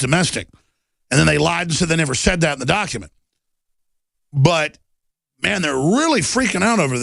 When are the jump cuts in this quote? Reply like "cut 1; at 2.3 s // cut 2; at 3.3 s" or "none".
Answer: cut 1; at 4.5 s

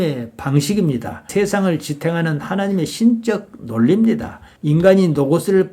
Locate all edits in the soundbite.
cut 1; at 1.3 s

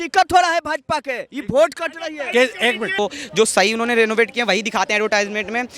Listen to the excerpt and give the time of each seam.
cut 1; at 3.0 s

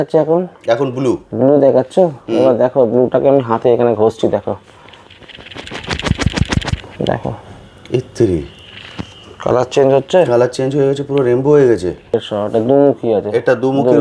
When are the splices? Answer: cut 1; at 6.8 s // cut 2; at 12.2 s

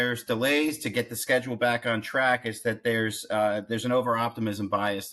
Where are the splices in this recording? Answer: none

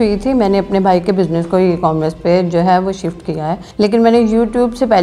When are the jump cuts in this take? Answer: cut 1; at 3.6 s

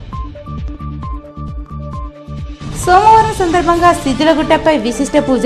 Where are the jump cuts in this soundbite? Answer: cut 1; at 1.2 s

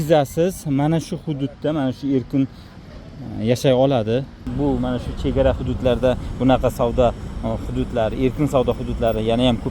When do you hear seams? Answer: cut 1; at 2.8 s // cut 2; at 4.5 s

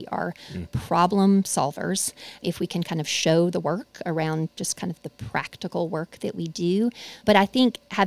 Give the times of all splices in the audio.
cut 1; at 2.4 s // cut 2; at 7.2 s

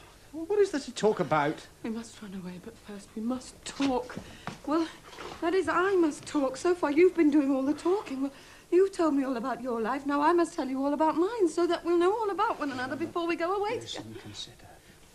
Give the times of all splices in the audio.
cut 1; at 11.6 s

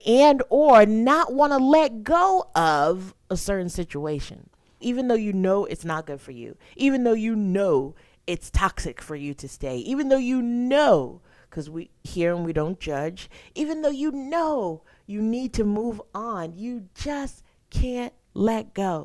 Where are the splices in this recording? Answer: cut 1; at 4.8 s

